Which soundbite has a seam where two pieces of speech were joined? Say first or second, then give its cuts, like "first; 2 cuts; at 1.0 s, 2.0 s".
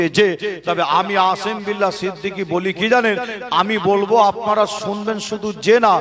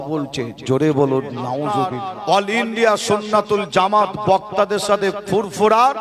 second; 1 cut; at 1.8 s